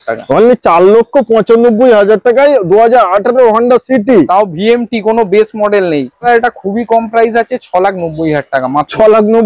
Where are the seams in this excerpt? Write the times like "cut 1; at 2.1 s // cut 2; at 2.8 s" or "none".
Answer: cut 1; at 6.2 s